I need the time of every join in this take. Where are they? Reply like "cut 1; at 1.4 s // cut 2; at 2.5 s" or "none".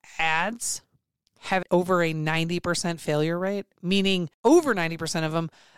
cut 1; at 1.6 s // cut 2; at 4.3 s